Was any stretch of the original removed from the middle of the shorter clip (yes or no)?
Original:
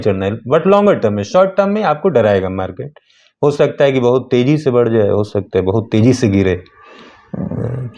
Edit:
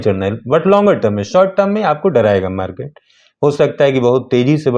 no